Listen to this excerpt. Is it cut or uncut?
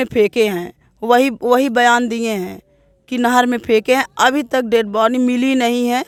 uncut